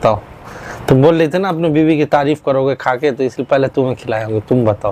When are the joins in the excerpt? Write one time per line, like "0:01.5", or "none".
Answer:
none